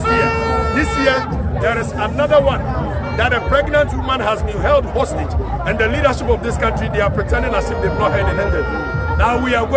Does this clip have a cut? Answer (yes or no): no